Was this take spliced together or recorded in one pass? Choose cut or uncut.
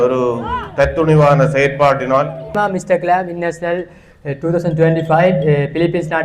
cut